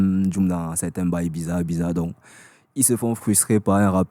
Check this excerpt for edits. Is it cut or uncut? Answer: uncut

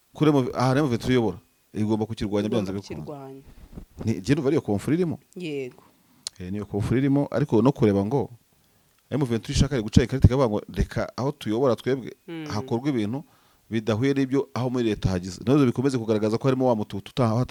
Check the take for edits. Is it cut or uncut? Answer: uncut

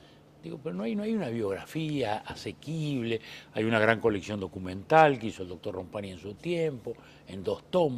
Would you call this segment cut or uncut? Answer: cut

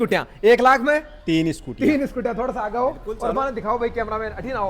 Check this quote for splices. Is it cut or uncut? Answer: uncut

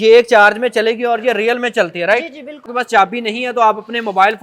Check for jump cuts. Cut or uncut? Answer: cut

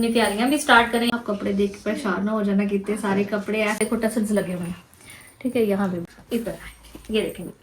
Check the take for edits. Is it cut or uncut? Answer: cut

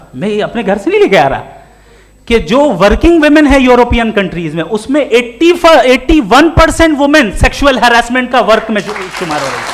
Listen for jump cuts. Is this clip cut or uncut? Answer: uncut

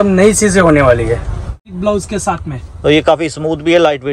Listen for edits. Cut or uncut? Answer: cut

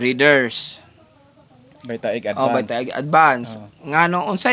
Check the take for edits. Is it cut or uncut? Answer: uncut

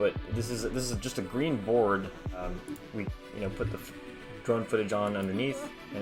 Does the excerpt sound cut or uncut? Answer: cut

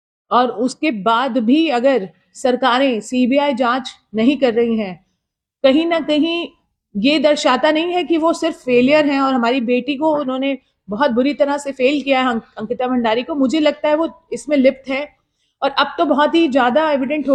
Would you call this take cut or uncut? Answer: uncut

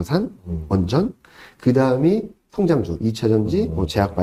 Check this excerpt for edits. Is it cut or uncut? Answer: uncut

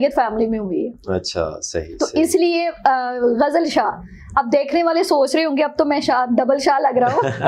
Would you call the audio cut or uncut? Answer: uncut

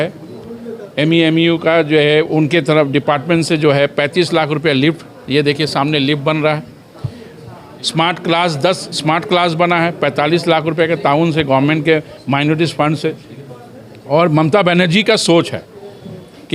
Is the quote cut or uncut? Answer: uncut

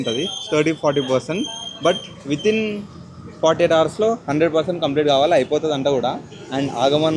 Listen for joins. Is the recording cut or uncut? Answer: uncut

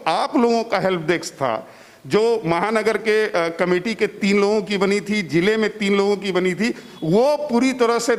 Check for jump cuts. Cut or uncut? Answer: uncut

